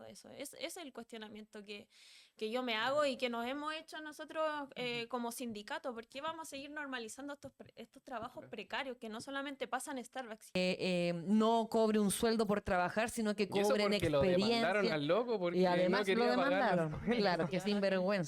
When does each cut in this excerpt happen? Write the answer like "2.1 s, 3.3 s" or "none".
10.6 s

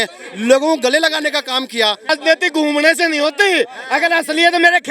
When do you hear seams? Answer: 2.1 s

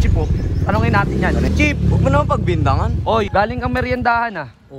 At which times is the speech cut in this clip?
1.5 s, 3.3 s

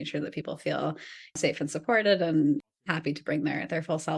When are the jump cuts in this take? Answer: 1.4 s, 2.6 s

